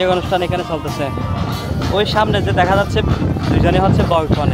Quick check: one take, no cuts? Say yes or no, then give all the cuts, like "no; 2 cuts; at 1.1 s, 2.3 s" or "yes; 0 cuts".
yes; 0 cuts